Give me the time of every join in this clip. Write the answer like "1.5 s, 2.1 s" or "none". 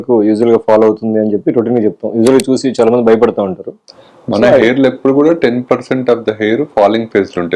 none